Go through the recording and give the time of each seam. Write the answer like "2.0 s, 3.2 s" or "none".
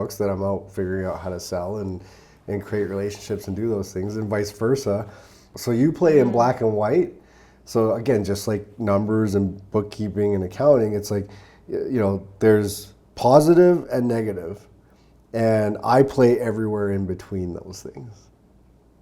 5.5 s